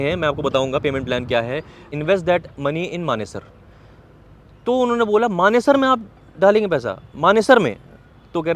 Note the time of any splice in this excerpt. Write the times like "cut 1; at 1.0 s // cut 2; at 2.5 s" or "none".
cut 1; at 1.9 s